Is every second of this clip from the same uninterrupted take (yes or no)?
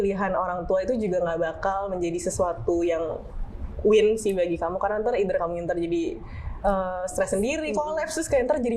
yes